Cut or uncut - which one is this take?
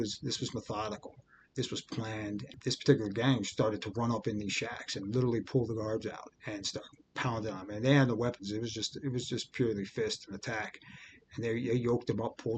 cut